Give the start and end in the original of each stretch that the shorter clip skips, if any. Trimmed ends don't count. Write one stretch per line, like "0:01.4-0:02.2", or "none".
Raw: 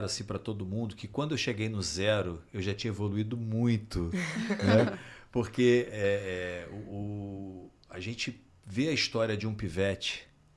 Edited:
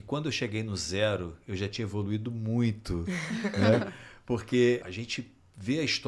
0:05.9-0:07.9